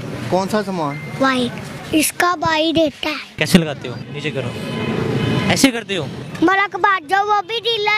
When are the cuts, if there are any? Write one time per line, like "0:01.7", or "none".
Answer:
0:01.7
0:03.3
0:06.2